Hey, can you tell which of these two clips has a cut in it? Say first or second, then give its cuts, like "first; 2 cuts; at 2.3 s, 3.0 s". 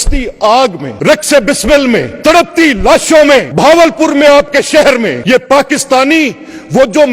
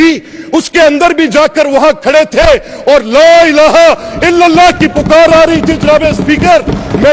first; 4 cuts; at 0.9 s, 2.1 s, 3.5 s, 5.2 s